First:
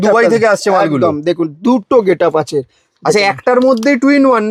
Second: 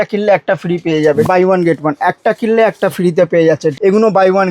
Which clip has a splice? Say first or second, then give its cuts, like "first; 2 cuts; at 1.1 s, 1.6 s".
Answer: second; 2 cuts; at 1.3 s, 3.7 s